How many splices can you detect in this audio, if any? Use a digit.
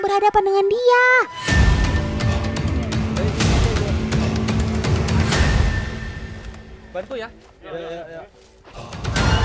1